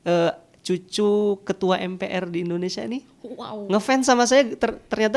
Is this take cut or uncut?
uncut